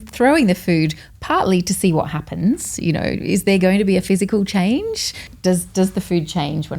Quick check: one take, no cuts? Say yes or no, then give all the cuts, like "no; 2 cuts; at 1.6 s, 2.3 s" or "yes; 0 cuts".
no; 1 cut; at 5.3 s